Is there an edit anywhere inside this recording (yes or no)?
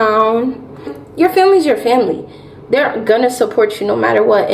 yes